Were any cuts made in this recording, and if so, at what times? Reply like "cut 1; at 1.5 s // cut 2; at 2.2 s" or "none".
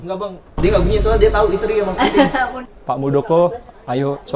cut 1; at 2.6 s